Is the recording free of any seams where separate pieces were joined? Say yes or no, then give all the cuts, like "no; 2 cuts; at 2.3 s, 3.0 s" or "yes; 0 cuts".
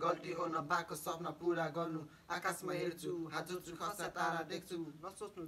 yes; 0 cuts